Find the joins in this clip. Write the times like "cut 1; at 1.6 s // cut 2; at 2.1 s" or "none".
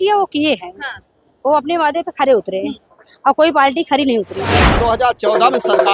cut 1; at 4.7 s